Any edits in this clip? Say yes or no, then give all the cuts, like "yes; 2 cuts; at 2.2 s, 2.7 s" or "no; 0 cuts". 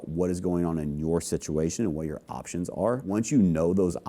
yes; 1 cut; at 3.1 s